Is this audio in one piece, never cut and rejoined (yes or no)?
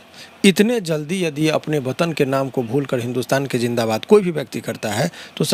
yes